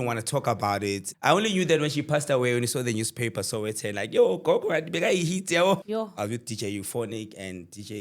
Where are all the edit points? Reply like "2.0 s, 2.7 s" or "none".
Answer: 1.1 s, 5.8 s

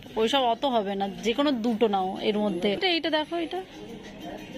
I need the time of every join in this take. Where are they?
2.8 s

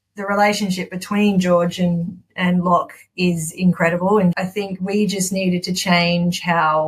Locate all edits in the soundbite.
4.3 s

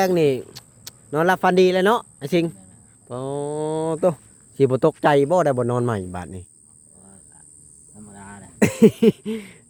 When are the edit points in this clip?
none

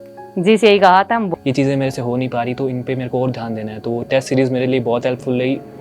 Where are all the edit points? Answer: 1.3 s

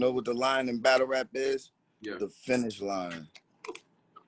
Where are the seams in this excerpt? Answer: none

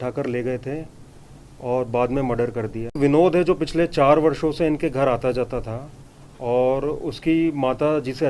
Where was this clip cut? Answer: 2.9 s

